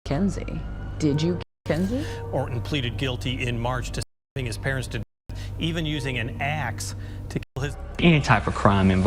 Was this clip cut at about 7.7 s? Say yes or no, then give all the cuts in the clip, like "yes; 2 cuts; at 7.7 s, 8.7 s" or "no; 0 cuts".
yes; 2 cuts; at 2.1 s, 7.7 s